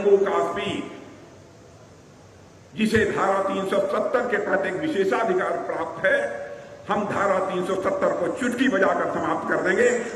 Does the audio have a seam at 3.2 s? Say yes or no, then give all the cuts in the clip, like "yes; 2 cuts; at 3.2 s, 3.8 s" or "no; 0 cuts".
no; 0 cuts